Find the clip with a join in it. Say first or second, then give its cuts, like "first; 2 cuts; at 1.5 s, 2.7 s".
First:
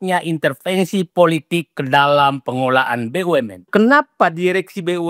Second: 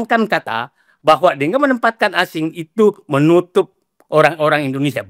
first; 1 cut; at 3.7 s